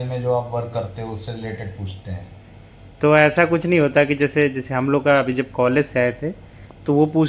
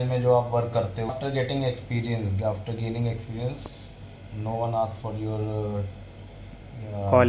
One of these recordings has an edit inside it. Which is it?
second; 1 cut; at 1.1 s

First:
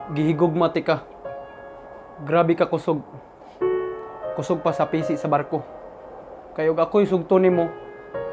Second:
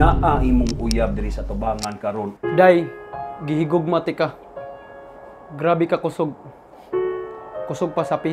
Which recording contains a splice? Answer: second; 1 cut; at 2.3 s

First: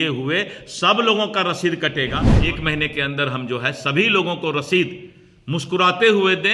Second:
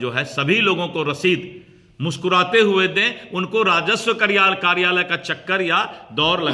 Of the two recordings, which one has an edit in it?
first; 1 cut; at 2.3 s

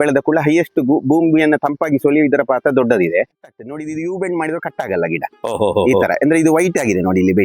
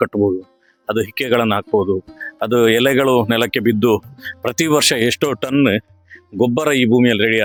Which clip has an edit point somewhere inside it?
first; 1 cut; at 3.3 s

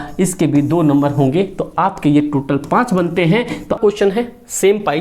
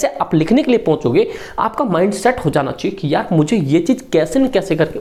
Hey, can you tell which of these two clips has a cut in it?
first; 1 cut; at 3.8 s

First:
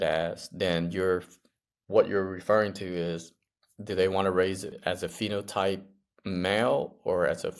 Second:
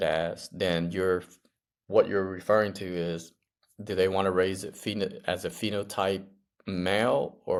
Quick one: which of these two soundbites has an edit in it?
first; 1 cut; at 4.8 s

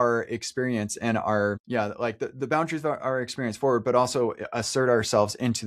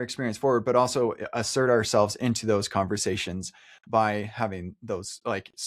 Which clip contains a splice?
first; 1 cut; at 1.6 s

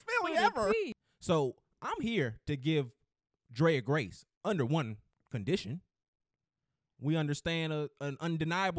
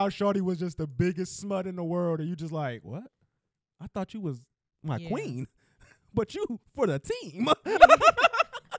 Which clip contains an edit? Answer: first; 1 cut; at 1.0 s

